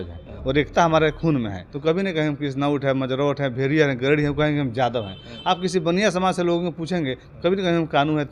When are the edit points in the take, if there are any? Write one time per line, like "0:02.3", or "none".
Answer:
0:01.6